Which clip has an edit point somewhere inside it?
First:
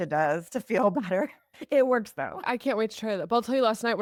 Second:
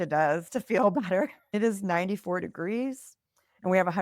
second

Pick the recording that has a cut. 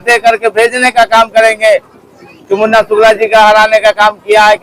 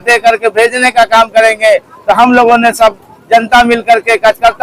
first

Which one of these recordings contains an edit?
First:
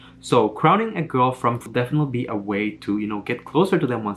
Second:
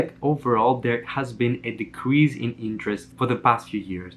first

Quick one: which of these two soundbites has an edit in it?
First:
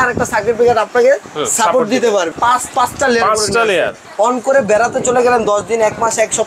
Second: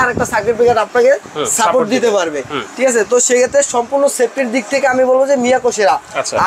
first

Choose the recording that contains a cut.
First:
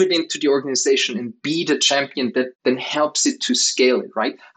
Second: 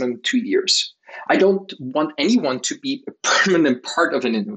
first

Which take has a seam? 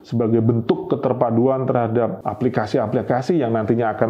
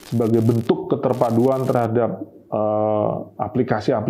first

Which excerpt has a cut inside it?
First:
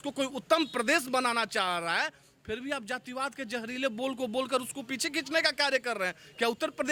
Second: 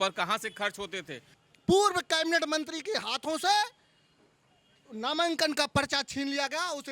second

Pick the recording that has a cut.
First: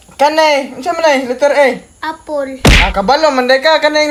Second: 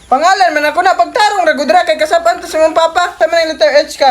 second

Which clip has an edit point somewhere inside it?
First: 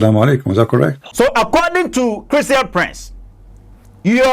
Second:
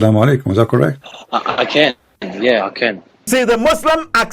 second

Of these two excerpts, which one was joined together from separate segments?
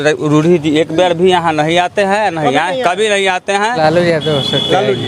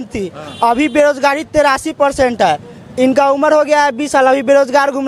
first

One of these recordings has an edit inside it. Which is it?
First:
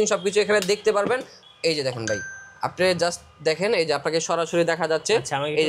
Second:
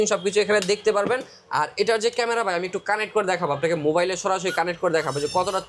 first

